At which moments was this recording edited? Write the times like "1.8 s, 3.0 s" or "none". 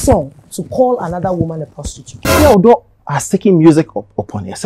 2.3 s